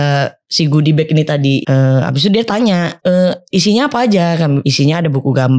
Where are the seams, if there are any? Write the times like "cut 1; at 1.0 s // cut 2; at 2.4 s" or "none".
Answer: cut 1; at 1.6 s // cut 2; at 2.9 s // cut 3; at 4.7 s